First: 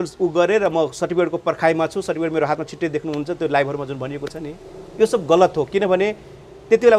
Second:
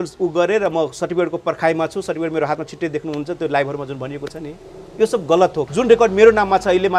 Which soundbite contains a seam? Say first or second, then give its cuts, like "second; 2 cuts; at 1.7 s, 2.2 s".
second; 1 cut; at 5.7 s